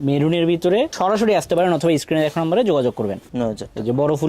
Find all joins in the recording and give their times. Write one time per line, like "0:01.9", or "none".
0:00.9
0:03.3